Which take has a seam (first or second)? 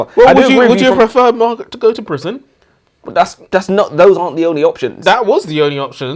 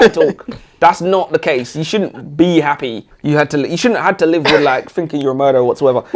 second